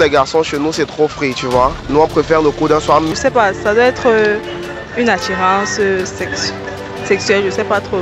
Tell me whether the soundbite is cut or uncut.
cut